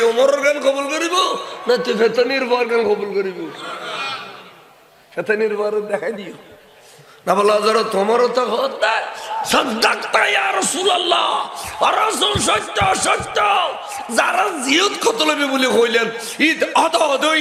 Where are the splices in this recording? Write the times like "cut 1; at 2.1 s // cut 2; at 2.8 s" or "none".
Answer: none